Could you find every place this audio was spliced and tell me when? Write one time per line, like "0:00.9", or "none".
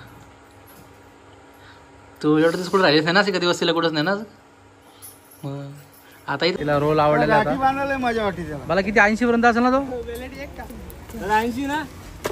0:06.6